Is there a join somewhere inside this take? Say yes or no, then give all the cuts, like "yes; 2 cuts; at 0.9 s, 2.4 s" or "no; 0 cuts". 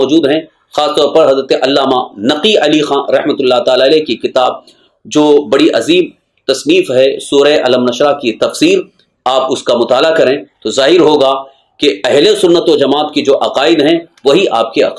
no; 0 cuts